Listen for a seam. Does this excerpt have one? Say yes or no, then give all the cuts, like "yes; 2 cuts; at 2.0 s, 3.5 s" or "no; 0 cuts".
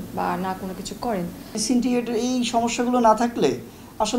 yes; 1 cut; at 1.6 s